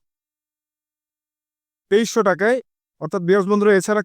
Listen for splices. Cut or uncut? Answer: cut